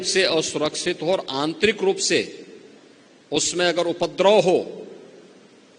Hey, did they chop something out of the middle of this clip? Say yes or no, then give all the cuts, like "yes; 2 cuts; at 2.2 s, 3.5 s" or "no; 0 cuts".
no; 0 cuts